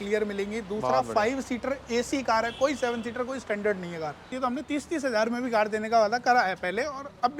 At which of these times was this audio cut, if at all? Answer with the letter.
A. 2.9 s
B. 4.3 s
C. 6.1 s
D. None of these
B